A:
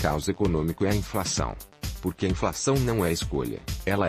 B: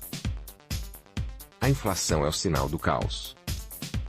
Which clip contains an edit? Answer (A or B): B